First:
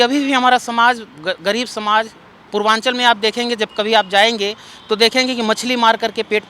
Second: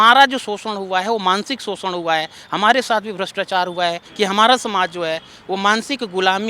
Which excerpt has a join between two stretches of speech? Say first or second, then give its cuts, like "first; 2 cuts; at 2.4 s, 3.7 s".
second; 1 cut; at 4.1 s